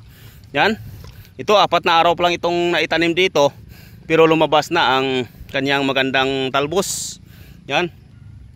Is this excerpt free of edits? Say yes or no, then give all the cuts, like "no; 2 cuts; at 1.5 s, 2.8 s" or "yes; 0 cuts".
yes; 0 cuts